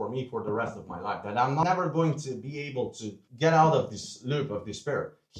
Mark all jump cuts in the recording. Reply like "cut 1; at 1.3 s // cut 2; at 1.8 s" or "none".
cut 1; at 1.6 s